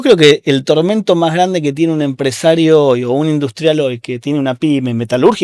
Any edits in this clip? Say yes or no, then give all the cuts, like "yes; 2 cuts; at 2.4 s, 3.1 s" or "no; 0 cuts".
no; 0 cuts